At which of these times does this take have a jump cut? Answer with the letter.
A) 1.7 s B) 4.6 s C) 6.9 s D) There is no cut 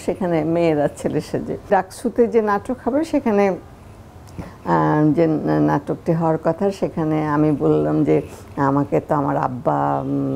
A